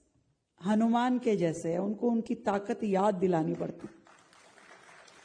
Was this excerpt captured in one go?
yes; 0 cuts

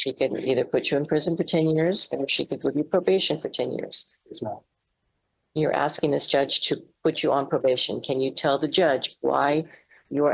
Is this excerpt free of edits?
yes; 0 cuts

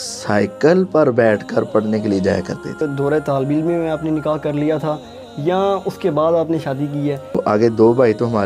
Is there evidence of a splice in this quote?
yes; 2 cuts; at 2.8 s, 7.4 s

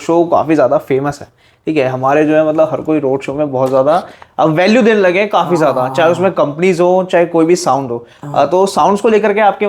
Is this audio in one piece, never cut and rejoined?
yes; 0 cuts

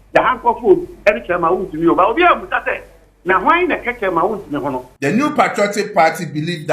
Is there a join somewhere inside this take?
yes; 1 cut; at 4.9 s

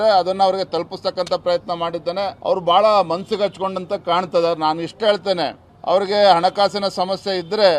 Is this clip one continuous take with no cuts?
no; 2 cuts; at 2.4 s, 5.7 s

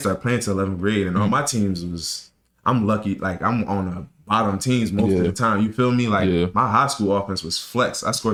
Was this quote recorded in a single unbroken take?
yes; 0 cuts

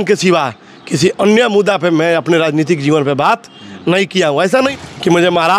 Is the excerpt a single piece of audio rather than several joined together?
no; 1 cut; at 4.7 s

